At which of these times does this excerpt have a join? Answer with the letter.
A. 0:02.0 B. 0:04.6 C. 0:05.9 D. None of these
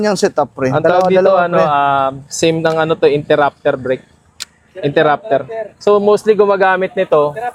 D